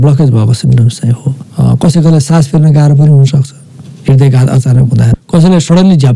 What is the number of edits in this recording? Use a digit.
2